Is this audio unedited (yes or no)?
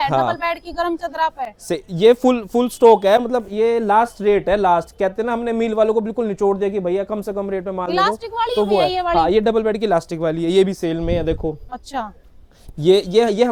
yes